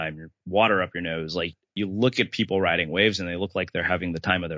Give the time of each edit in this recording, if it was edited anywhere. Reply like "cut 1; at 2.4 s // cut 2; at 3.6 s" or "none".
cut 1; at 1.7 s